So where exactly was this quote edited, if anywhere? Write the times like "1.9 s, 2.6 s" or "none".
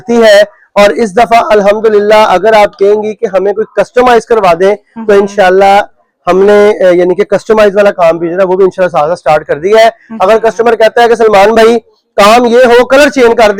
none